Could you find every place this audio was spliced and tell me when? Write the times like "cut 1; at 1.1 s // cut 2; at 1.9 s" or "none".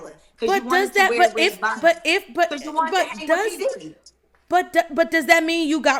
none